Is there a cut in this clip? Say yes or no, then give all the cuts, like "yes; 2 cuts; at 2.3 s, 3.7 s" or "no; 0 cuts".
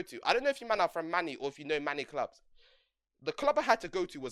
no; 0 cuts